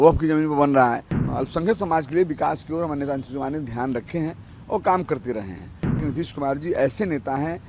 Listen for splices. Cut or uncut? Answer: cut